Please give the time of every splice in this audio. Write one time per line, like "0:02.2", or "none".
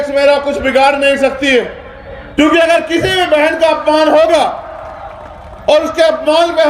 0:02.2